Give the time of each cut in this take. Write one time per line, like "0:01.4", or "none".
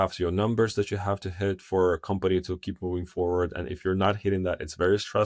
none